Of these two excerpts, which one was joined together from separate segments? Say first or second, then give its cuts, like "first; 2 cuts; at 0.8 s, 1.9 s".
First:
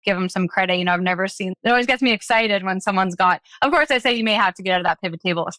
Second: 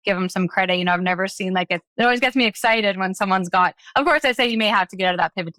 first; 1 cut; at 1.5 s